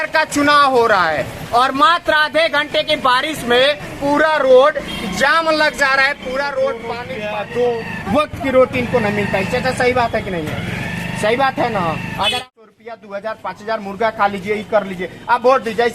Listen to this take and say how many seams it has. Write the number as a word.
two